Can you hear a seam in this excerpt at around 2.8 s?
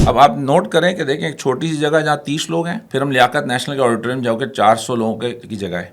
yes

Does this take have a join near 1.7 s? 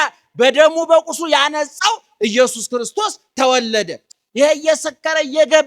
no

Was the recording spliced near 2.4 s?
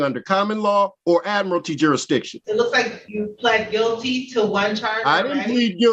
yes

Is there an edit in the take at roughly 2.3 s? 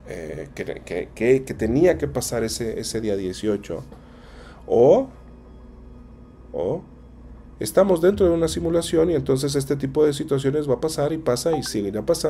no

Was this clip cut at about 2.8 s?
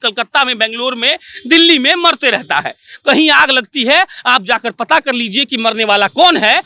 no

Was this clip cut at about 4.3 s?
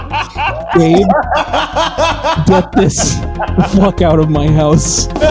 no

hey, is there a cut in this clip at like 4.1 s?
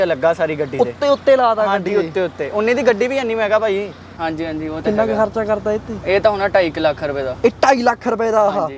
yes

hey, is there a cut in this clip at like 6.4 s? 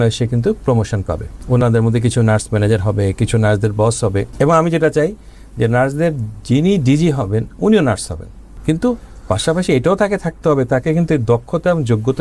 no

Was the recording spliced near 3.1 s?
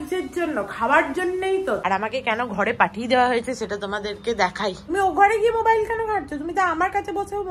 no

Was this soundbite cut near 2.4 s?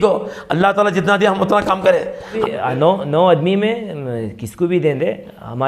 yes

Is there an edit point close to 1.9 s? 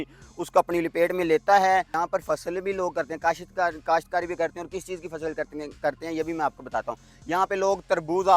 yes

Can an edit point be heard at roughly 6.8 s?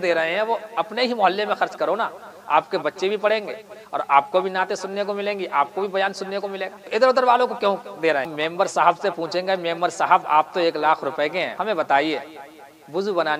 yes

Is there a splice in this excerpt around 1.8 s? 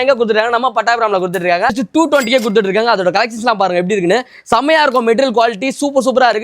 yes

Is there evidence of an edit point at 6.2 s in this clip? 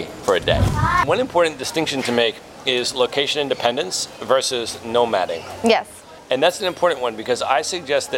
no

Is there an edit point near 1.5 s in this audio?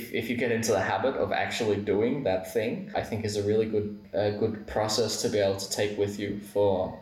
no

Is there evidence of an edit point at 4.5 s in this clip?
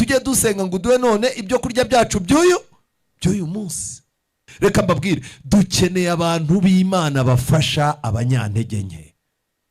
yes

